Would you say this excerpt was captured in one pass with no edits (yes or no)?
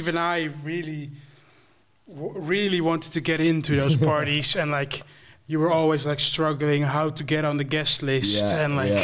yes